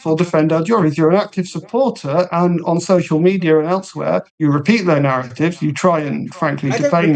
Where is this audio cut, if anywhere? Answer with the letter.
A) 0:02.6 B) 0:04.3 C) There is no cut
B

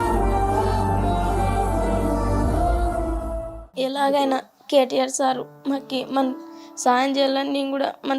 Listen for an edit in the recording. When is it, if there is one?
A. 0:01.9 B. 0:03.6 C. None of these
B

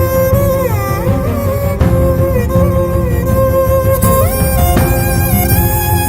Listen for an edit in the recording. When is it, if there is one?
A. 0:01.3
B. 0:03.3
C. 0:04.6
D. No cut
D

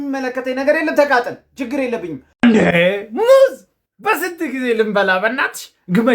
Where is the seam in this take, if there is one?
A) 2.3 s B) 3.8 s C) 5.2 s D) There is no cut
A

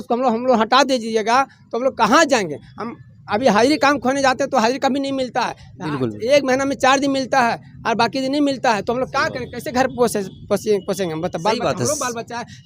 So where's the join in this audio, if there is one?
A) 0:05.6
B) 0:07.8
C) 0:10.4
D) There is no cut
D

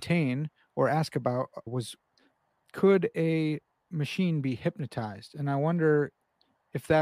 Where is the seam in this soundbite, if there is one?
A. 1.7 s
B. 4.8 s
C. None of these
A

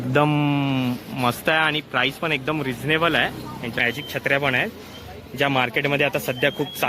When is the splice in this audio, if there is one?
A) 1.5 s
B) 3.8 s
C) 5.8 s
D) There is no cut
B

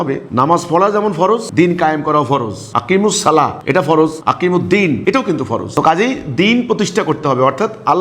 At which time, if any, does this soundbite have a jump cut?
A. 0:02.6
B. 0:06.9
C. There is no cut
C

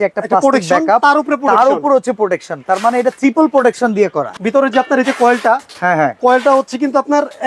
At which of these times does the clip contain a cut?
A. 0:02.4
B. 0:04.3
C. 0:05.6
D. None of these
B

